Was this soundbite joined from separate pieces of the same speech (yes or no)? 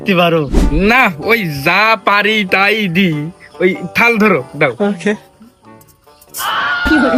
no